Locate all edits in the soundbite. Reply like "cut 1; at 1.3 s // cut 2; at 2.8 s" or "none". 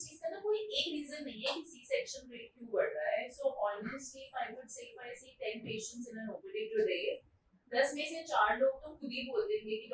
none